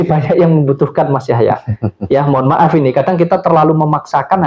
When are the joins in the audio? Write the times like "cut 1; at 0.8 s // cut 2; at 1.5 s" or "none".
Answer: none